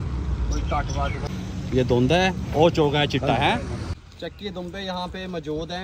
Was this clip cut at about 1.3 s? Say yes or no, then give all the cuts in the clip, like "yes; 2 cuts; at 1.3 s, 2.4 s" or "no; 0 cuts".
yes; 2 cuts; at 1.3 s, 4.0 s